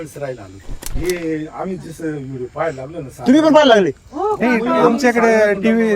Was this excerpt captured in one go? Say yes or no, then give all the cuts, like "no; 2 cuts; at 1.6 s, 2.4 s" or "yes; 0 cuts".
no; 1 cut; at 0.9 s